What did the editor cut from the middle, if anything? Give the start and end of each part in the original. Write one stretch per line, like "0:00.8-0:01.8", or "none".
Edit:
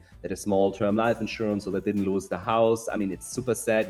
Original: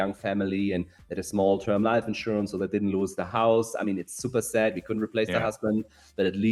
none